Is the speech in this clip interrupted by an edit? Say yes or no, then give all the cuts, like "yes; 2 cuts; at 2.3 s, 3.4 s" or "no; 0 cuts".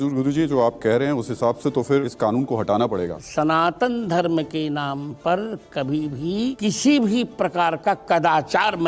yes; 3 cuts; at 2.1 s, 3.2 s, 6.6 s